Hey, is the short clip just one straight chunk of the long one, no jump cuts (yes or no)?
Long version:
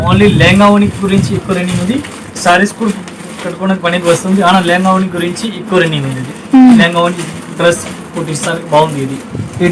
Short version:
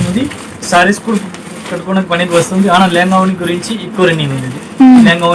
yes